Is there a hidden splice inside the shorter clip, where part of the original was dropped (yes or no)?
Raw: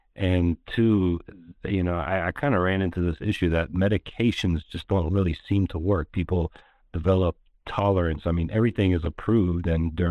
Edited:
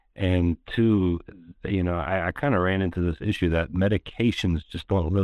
no